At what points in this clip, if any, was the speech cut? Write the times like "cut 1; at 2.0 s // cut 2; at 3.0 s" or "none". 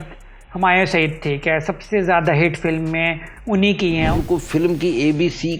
cut 1; at 4.1 s